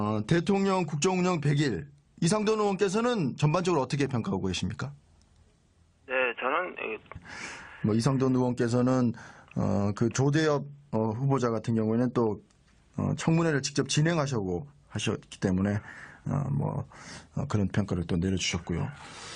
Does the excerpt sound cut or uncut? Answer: uncut